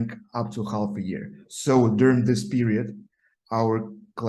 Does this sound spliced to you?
no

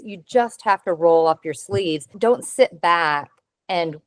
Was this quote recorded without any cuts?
no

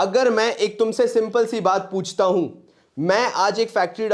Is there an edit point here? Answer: no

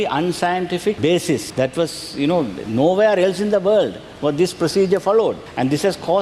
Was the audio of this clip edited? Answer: no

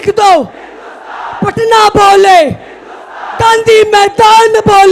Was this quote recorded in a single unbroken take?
yes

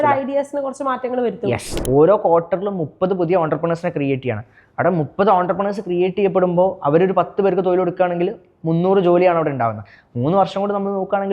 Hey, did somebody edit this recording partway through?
yes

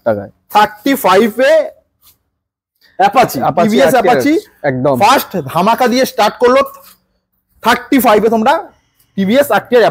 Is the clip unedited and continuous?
yes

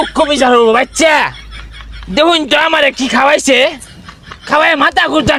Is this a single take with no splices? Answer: yes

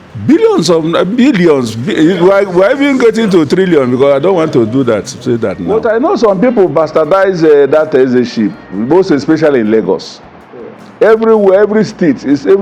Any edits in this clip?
yes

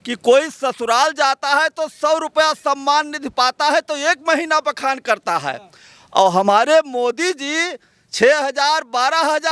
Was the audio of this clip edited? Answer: no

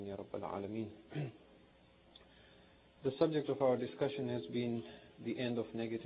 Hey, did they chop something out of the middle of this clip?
yes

